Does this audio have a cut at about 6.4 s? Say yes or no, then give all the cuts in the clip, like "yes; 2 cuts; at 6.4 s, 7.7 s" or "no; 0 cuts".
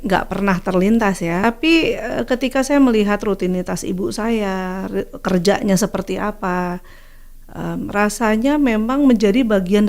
no; 1 cut; at 1.4 s